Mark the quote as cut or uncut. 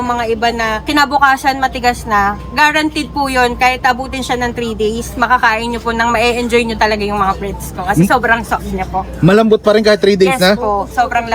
uncut